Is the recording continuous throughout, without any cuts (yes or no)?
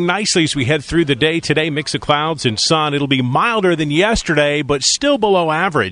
no